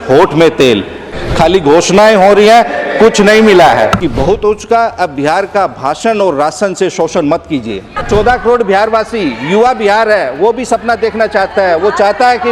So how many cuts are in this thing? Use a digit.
3